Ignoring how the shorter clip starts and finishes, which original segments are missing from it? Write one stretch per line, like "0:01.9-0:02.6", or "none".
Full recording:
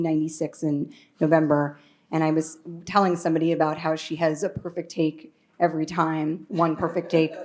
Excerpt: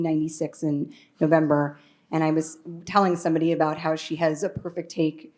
none